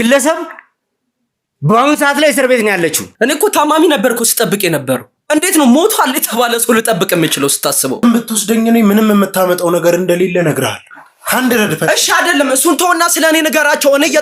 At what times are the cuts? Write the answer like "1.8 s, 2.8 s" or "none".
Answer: 3.0 s, 8.0 s

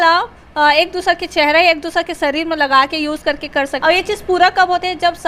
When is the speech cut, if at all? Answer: 3.7 s

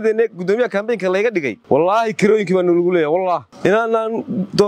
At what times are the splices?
1.6 s, 3.5 s

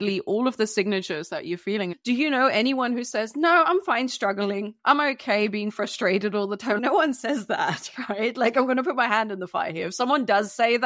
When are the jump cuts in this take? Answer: 2.0 s, 4.8 s, 6.8 s

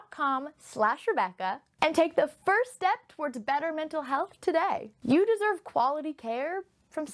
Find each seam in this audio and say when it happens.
none

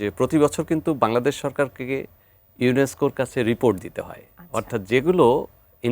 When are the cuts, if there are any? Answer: none

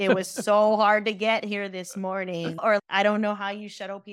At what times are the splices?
2.8 s

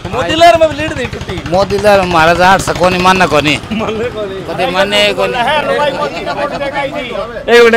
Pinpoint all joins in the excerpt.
none

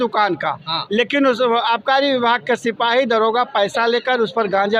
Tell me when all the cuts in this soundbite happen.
none

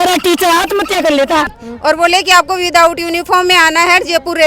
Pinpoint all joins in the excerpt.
1.5 s

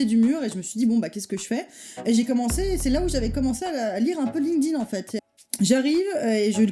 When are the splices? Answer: 5.2 s

